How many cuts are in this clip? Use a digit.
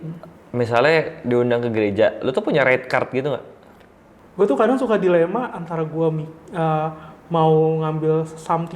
1